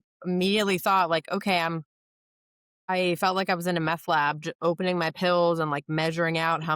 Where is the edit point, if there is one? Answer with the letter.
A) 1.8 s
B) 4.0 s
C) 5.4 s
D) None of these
D